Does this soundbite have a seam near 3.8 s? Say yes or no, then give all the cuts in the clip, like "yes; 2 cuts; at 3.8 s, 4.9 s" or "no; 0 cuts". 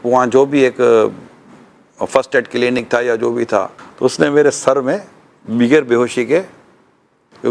yes; 1 cut; at 3.8 s